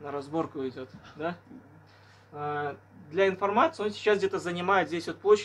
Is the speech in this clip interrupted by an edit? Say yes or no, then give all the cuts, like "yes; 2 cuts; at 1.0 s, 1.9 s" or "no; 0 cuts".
no; 0 cuts